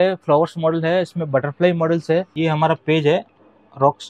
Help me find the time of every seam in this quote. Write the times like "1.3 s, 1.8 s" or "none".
2.3 s